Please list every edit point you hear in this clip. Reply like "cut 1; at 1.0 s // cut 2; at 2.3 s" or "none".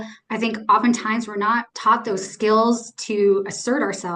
cut 1; at 1.7 s